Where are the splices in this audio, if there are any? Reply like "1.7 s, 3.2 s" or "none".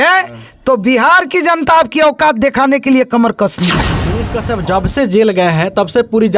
3.9 s